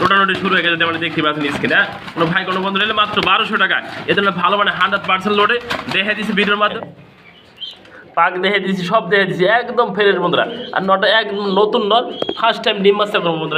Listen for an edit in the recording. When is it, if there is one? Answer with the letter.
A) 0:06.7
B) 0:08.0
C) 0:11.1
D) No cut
A